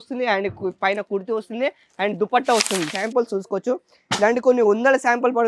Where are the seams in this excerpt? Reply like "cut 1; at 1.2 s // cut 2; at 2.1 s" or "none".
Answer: cut 1; at 2.9 s

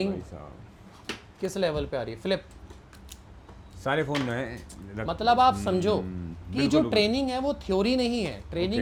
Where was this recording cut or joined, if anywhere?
none

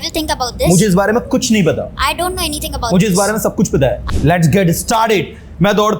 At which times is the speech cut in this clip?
cut 1; at 4.1 s

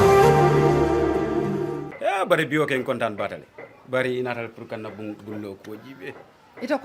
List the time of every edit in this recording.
cut 1; at 1.9 s

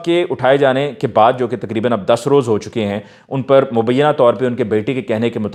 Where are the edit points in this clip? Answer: none

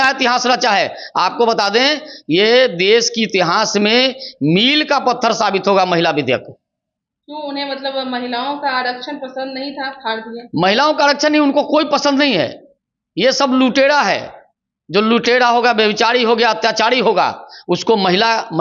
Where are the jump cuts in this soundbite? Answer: none

